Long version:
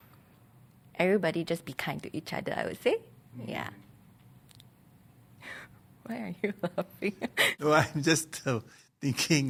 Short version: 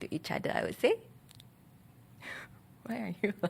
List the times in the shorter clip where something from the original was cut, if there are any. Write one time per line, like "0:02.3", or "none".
0:01.2